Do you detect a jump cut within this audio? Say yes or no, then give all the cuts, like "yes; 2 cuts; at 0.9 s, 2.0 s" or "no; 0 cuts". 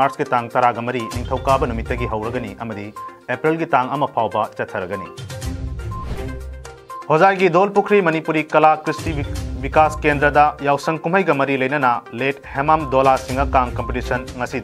no; 0 cuts